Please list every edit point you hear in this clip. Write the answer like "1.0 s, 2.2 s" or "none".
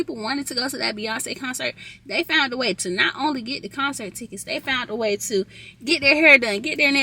none